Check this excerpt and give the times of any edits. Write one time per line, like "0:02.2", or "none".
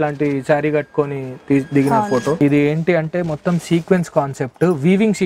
0:02.4